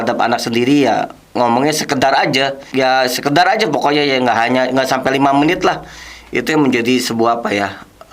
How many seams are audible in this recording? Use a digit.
0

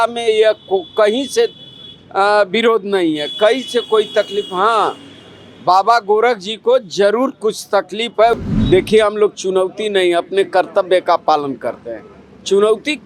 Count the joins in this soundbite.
1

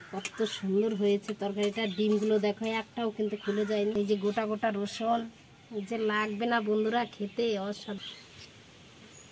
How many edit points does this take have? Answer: 2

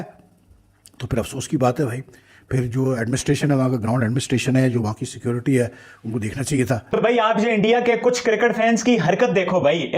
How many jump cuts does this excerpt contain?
1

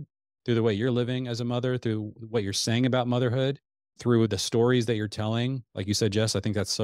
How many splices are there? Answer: 1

